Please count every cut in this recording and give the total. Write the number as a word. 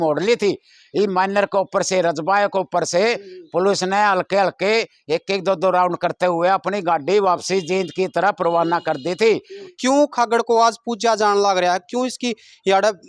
one